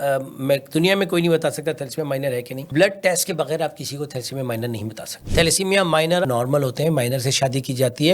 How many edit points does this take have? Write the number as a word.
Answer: two